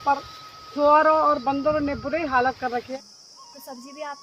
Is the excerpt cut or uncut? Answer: cut